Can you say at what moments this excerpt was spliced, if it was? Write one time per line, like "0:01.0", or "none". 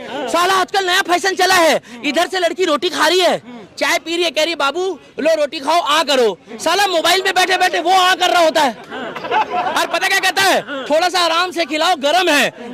none